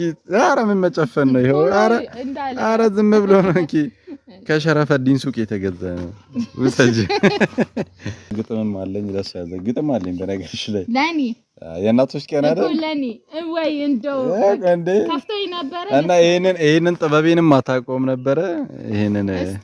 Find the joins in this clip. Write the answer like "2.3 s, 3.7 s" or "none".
8.3 s